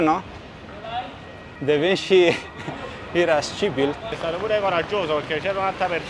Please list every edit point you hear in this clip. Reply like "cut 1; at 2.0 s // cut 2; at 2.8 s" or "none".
cut 1; at 1.5 s // cut 2; at 4.1 s